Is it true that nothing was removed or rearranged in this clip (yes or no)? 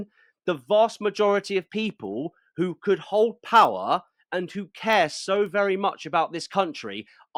yes